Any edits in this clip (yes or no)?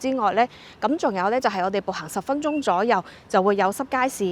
no